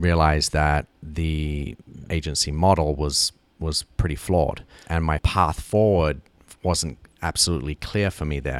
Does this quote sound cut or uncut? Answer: cut